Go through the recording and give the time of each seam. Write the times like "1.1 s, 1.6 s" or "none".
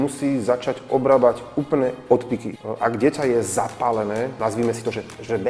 2.6 s, 4.3 s